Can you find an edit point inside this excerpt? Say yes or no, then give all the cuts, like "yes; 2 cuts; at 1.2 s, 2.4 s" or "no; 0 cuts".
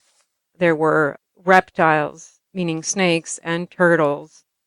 yes; 2 cuts; at 1.2 s, 2.4 s